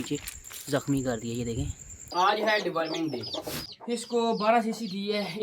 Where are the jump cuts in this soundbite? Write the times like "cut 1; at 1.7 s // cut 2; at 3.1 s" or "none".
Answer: cut 1; at 2.0 s // cut 2; at 3.6 s